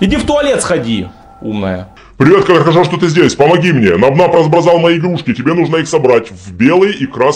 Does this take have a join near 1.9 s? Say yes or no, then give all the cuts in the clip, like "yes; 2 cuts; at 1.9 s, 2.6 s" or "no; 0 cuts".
yes; 1 cut; at 1.9 s